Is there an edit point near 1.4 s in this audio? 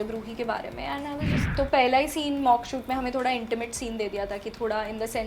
yes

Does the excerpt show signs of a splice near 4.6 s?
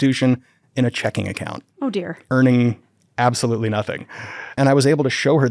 yes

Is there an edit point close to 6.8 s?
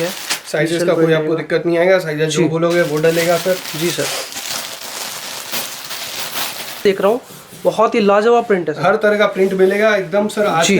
yes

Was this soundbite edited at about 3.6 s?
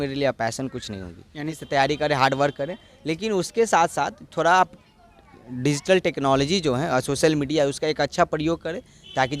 no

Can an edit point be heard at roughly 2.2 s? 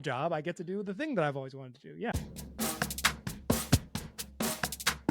yes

